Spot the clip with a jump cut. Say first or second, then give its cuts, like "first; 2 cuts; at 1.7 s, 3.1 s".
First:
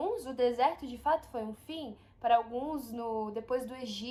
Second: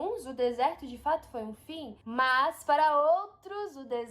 second; 1 cut; at 2.0 s